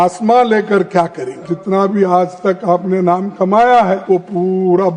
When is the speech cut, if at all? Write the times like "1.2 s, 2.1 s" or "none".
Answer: 1.5 s, 4.0 s